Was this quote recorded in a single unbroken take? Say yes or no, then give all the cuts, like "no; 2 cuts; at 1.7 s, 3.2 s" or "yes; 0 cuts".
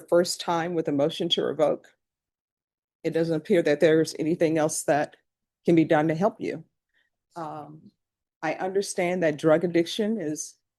yes; 0 cuts